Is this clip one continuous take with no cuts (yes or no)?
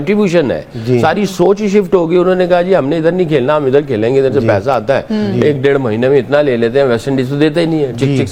yes